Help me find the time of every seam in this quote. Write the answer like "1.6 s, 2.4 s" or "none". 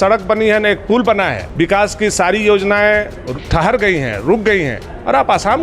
1.4 s